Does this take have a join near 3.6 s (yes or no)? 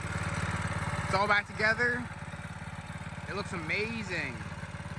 no